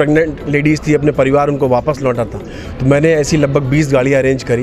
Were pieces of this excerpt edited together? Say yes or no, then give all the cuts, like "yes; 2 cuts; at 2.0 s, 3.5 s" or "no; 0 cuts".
no; 0 cuts